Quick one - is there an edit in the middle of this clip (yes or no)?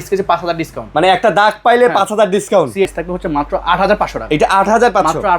yes